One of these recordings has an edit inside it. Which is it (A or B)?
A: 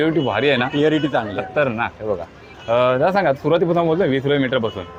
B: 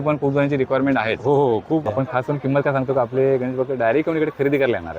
B